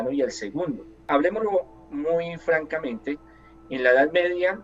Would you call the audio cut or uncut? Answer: cut